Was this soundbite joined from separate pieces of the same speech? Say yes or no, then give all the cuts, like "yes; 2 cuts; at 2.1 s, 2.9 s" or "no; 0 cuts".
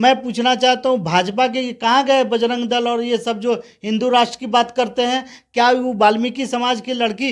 no; 0 cuts